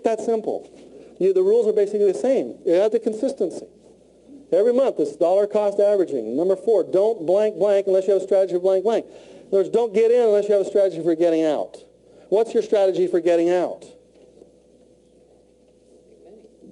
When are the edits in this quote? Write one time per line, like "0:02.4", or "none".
none